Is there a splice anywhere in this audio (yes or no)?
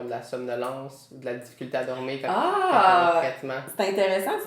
no